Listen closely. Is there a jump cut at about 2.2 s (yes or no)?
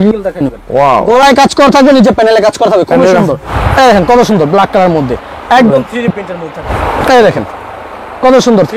no